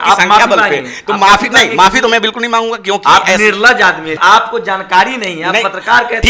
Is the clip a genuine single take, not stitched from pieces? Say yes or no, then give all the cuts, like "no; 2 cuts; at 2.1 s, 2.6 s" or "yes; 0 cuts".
no; 1 cut; at 4.2 s